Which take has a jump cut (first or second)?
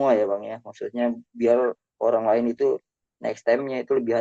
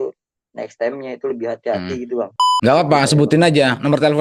second